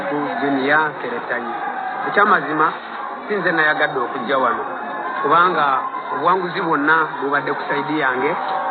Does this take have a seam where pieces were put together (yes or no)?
no